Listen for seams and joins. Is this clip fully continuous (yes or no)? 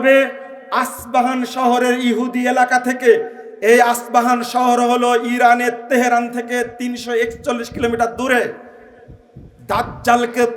yes